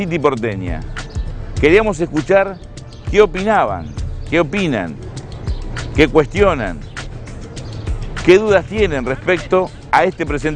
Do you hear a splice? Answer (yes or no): no